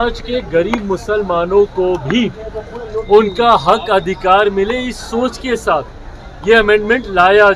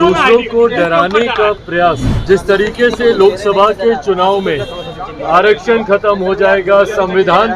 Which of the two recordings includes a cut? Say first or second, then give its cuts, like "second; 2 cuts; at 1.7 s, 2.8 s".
second; 1 cut; at 2.1 s